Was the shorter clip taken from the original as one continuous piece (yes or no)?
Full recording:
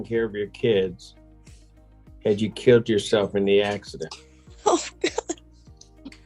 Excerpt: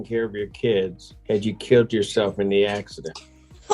no